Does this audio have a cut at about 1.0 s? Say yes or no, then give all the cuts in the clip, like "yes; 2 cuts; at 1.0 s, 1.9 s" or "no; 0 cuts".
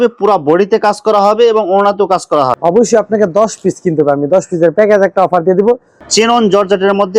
no; 2 cuts; at 2.5 s, 6.0 s